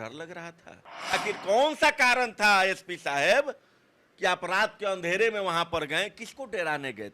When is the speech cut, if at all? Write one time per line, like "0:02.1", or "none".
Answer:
0:01.2